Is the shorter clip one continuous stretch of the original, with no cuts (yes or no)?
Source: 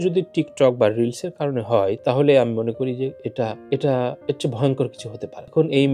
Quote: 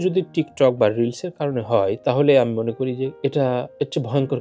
no